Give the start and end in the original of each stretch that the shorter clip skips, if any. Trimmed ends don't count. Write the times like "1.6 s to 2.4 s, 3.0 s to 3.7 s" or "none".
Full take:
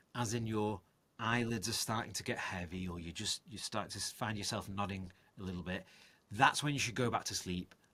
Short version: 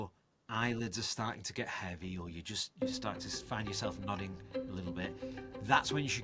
none